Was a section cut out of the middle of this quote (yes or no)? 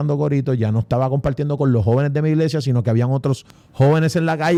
no